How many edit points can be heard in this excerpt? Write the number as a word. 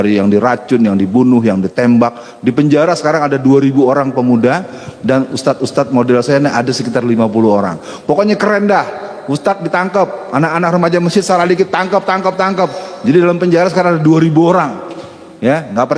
zero